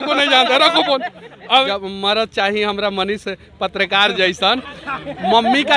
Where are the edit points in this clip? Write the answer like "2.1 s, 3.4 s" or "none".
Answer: 1.7 s